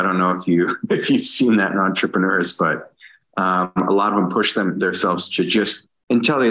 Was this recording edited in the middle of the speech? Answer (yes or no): no